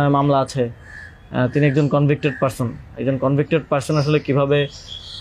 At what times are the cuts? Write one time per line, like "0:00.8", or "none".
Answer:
none